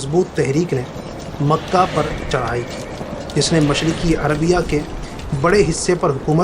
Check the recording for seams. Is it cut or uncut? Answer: uncut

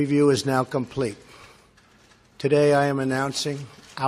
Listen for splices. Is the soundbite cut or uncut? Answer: cut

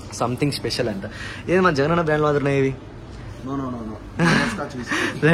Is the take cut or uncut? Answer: uncut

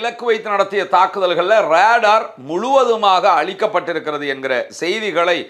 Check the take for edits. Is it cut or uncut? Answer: uncut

